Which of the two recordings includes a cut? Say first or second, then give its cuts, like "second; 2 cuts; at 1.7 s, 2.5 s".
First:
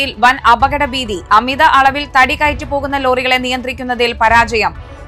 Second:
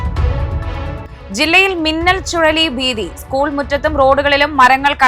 second; 1 cut; at 1.1 s